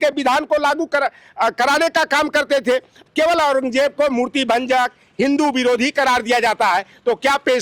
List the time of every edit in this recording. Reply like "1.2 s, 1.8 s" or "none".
3.0 s